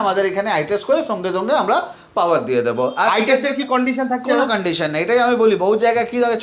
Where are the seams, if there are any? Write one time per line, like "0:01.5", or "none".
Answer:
none